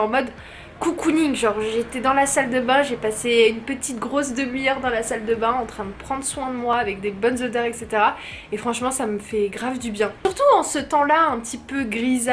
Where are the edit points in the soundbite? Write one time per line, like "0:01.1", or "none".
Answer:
none